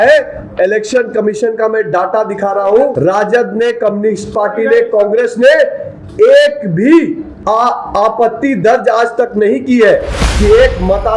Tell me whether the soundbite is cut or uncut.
cut